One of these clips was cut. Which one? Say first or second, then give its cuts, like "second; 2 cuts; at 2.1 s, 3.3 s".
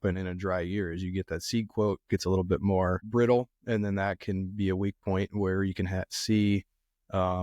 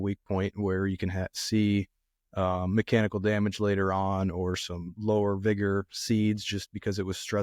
first; 1 cut; at 3.0 s